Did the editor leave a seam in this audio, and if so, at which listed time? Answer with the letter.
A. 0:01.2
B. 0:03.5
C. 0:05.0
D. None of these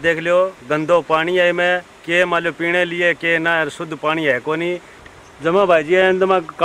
C